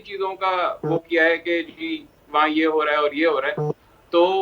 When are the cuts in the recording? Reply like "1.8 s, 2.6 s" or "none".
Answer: none